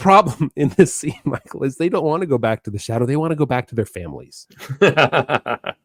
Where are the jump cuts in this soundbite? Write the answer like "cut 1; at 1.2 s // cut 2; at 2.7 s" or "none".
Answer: none